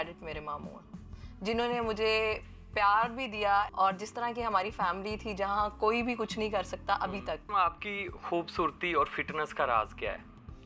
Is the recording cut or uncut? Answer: cut